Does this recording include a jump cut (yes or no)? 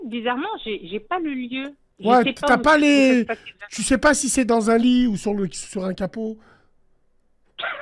yes